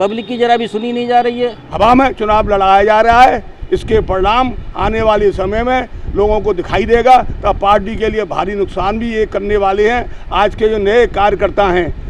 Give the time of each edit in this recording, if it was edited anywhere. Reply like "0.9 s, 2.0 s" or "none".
1.6 s